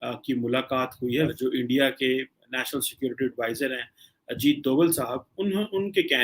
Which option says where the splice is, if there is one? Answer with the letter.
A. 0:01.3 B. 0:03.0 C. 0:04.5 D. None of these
A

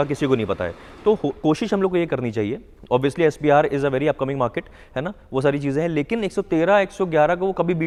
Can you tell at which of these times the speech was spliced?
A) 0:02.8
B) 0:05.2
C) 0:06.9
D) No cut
D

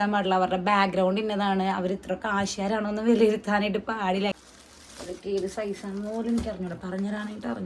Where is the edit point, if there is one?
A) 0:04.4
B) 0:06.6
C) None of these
A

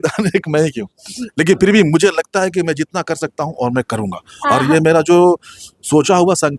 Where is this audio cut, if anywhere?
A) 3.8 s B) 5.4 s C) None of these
C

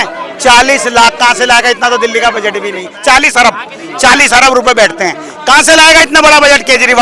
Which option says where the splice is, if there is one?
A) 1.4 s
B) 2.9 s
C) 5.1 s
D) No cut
D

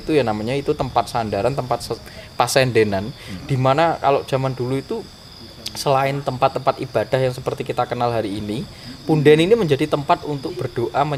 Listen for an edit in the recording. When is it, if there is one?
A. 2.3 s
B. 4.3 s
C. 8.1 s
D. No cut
D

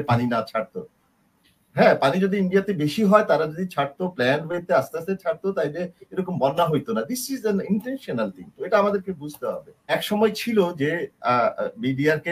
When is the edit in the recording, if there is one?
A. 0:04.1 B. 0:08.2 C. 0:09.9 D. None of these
C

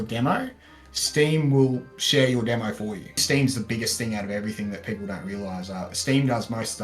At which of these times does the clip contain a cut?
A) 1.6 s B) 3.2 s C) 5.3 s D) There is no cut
B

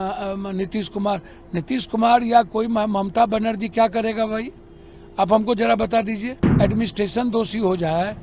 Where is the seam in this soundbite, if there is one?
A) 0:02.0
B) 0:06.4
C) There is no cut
B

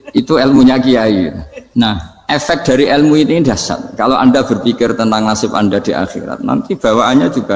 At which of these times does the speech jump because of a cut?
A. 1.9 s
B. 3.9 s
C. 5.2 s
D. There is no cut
A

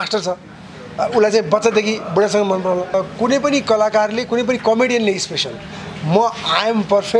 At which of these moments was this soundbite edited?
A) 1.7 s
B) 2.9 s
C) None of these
B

